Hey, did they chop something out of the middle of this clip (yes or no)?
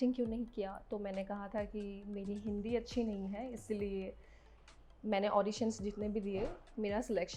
no